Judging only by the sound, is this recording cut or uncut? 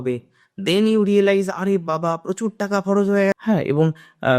cut